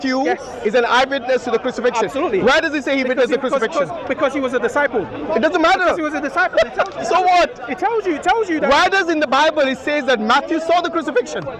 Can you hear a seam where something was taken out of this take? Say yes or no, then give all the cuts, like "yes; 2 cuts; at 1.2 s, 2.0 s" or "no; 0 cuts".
no; 0 cuts